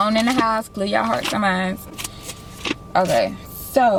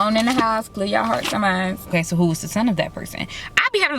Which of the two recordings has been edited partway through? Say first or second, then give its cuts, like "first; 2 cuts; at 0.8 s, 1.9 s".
second; 1 cut; at 1.9 s